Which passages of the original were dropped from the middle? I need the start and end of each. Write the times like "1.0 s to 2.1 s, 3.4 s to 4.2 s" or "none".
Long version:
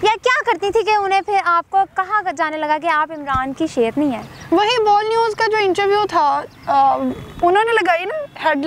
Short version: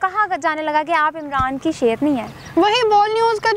none